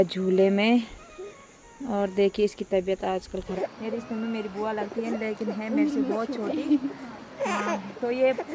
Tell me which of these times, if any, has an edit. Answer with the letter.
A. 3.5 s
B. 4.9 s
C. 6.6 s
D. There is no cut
A